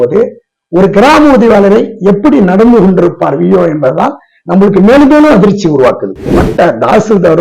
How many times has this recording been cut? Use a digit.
1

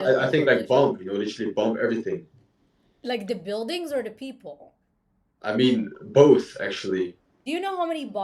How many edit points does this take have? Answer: 1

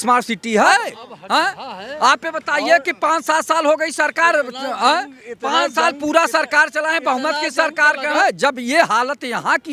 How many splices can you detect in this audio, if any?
2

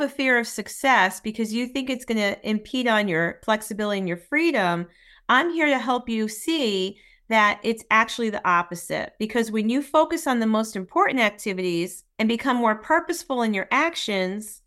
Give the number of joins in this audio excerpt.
2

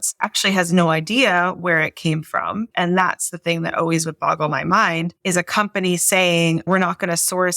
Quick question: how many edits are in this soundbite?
2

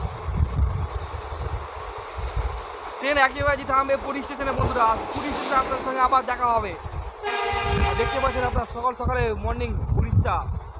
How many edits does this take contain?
0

